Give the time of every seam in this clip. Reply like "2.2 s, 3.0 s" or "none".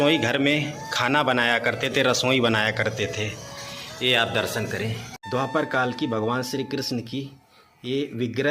5.1 s